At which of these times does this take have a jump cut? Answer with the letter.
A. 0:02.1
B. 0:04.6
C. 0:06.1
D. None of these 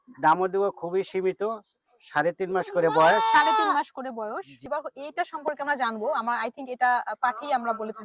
B